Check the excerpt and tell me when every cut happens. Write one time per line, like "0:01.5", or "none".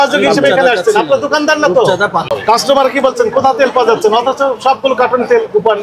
0:02.3